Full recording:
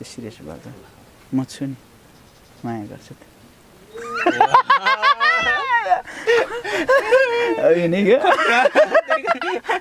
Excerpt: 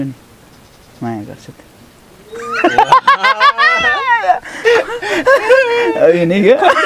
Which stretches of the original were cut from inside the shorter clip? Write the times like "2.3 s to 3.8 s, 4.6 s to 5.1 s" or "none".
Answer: none